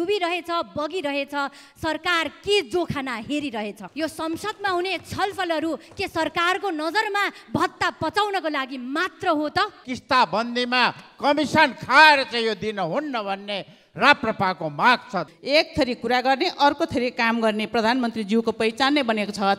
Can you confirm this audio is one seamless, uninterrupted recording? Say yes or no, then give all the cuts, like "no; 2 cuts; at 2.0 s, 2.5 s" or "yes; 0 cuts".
no; 3 cuts; at 3.8 s, 9.9 s, 15.3 s